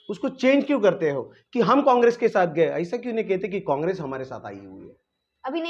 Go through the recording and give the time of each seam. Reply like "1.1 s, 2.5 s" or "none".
none